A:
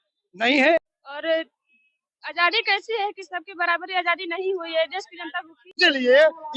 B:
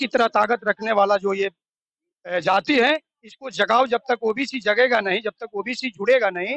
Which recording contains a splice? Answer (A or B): A